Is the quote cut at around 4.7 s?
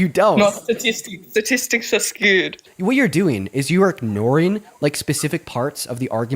no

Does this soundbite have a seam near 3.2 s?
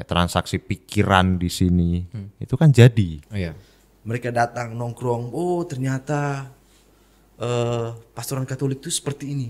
yes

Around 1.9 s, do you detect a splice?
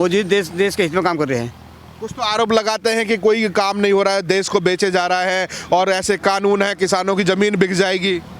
no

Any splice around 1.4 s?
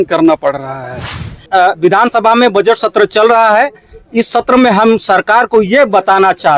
yes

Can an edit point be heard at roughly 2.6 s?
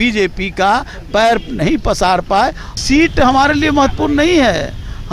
yes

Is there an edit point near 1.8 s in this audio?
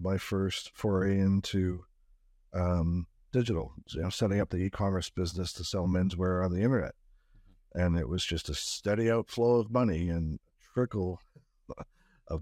no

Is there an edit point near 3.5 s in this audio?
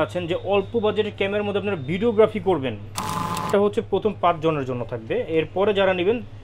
yes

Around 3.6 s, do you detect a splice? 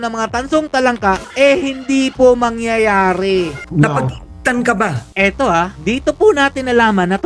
yes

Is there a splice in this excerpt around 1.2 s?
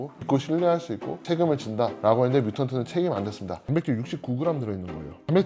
yes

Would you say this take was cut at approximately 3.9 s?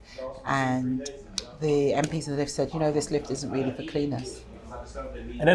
no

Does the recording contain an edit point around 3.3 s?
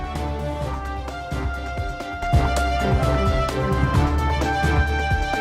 no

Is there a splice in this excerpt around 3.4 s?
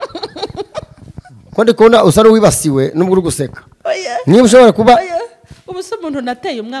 no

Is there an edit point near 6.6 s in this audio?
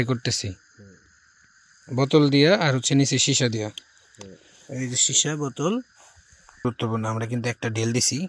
yes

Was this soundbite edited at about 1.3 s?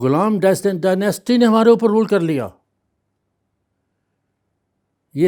no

